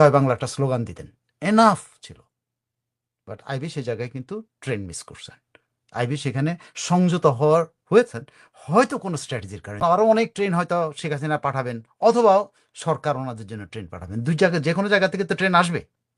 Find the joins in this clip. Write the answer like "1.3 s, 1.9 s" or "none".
9.8 s

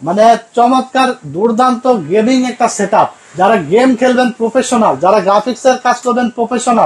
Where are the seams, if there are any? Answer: none

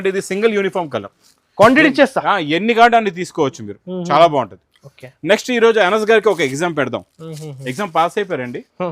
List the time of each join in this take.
none

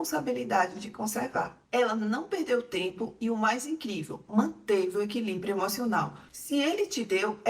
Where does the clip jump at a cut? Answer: 1.6 s, 6.2 s

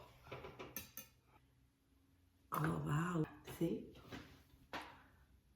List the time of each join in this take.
1.4 s, 3.2 s

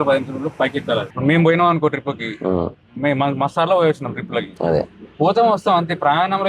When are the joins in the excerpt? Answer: 1.1 s

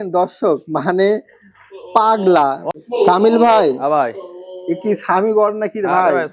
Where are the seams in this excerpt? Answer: 2.6 s

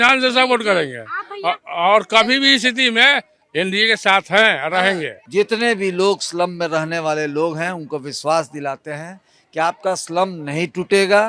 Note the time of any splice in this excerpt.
5.2 s

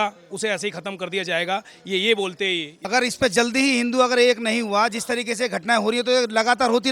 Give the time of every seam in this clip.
2.9 s

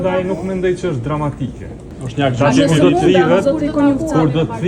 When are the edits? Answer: 1.9 s

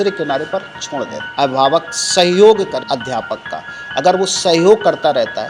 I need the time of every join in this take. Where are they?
1.2 s, 2.8 s

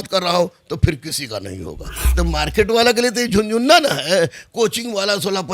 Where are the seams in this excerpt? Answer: 1.9 s

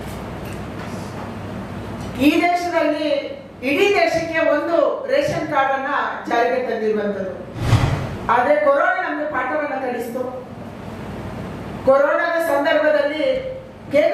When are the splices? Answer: 7.6 s

